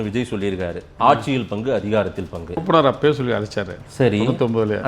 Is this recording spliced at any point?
yes; 1 cut; at 2.6 s

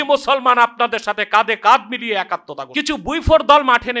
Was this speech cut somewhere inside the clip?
yes; 1 cut; at 2.6 s

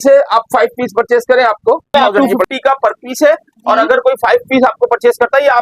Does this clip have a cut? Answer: yes; 1 cut; at 1.9 s

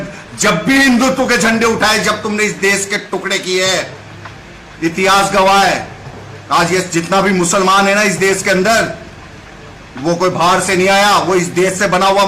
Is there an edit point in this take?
no; 0 cuts

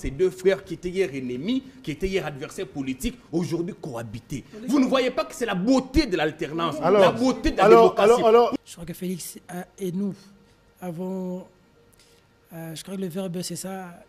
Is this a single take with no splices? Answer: no; 1 cut; at 8.6 s

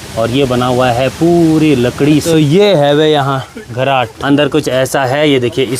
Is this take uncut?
no; 2 cuts; at 2.2 s, 4.2 s

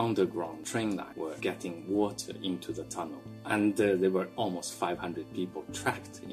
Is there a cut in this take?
yes; 3 cuts; at 1.0 s, 3.3 s, 4.3 s

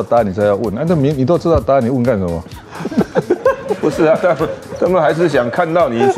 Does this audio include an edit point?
no; 0 cuts

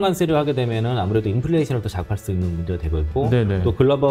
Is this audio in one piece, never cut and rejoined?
yes; 0 cuts

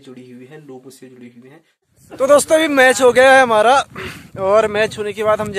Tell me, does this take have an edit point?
yes; 1 cut; at 1.9 s

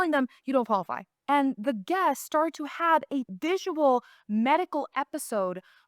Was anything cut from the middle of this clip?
yes; 2 cuts; at 1.1 s, 3.3 s

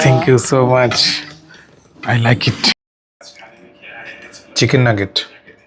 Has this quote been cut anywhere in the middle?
yes; 1 cut; at 2.7 s

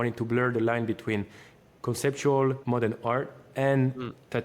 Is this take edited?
yes; 1 cut; at 2.6 s

